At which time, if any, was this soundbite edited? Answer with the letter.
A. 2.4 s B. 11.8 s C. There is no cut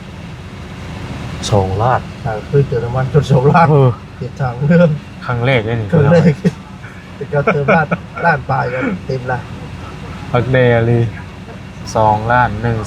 B